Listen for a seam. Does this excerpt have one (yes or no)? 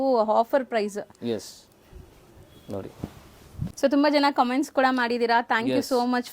yes